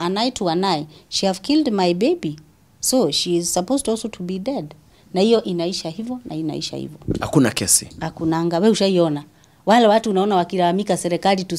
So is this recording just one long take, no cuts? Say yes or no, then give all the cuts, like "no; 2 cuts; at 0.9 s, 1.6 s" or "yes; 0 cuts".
yes; 0 cuts